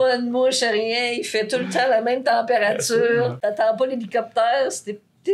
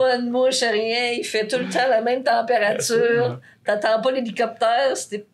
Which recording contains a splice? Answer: first; 1 cut; at 3.4 s

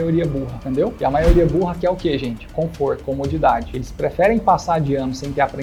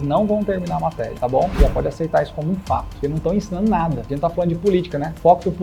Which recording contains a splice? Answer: second; 2 cuts; at 2.9 s, 4.0 s

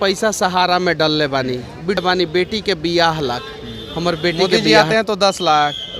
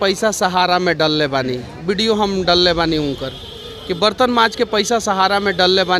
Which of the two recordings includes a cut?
first; 2 cuts; at 2.0 s, 4.5 s

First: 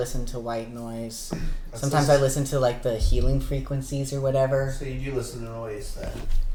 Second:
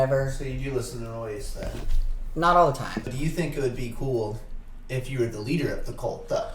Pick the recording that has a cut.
second; 1 cut; at 3.1 s

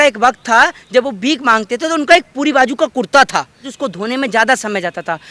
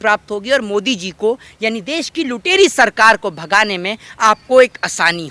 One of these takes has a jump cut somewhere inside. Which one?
first; 1 cut; at 3.7 s

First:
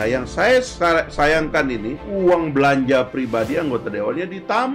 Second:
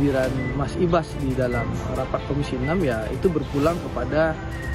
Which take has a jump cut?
first; 1 cut; at 2.0 s

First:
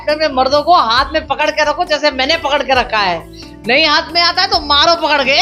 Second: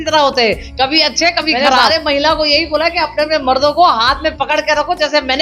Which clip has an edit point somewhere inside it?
second; 1 cut; at 1.8 s

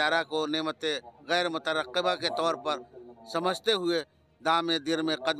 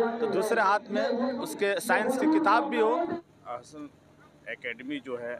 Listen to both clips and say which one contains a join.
second; 1 cut; at 3.1 s

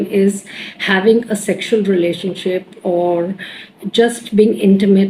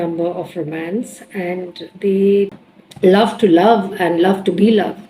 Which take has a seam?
second; 1 cut; at 2.6 s

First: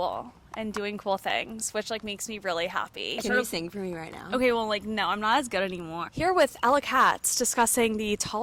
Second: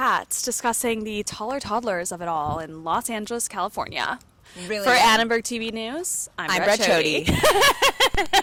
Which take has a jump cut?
first; 2 cuts; at 3.2 s, 6.0 s

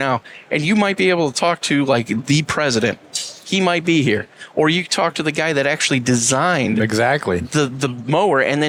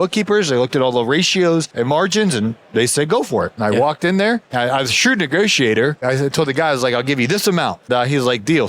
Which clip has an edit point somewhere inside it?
second; 4 cuts; at 1.7 s, 4.5 s, 6.0 s, 7.9 s

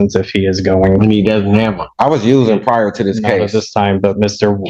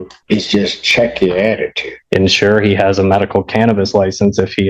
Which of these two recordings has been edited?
second; 1 cut; at 2.1 s

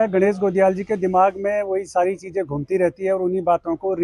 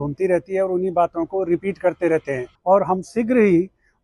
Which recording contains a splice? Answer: second; 1 cut; at 2.5 s

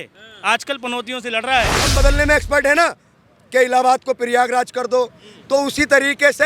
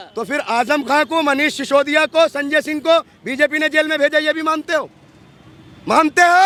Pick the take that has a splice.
first; 1 cut; at 1.9 s

